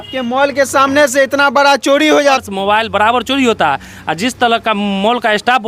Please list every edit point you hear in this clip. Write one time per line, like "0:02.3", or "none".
0:02.4